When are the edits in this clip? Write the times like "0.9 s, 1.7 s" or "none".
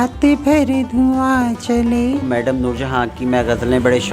2.2 s